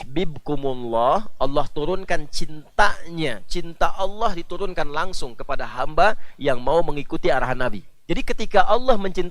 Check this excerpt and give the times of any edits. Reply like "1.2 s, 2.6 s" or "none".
7.9 s